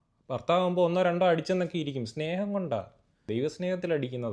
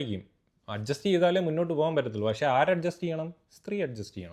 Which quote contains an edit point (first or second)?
first